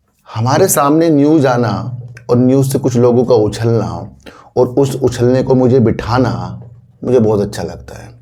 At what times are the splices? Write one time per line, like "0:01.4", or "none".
none